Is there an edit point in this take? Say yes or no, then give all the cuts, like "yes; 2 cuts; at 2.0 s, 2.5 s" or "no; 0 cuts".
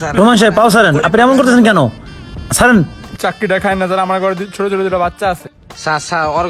no; 0 cuts